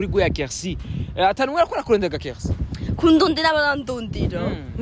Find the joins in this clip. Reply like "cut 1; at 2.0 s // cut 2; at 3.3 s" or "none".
none